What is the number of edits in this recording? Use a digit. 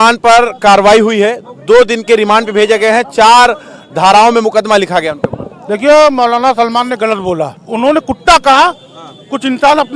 1